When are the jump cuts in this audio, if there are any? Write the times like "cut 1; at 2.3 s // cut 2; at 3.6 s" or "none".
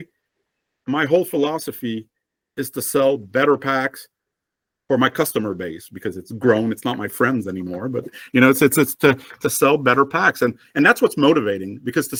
none